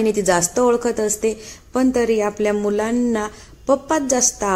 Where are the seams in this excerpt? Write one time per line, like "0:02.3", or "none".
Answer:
none